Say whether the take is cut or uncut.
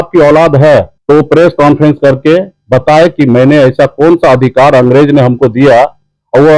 cut